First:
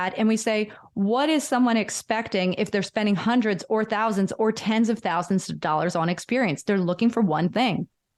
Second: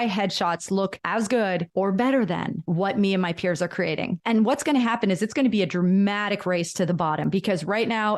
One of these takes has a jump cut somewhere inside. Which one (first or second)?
second